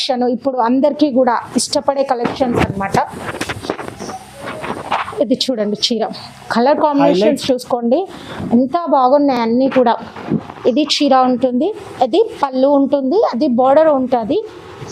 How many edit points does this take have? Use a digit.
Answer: 0